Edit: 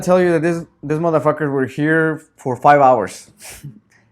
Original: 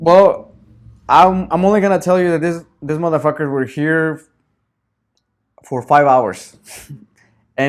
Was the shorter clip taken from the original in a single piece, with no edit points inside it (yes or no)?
no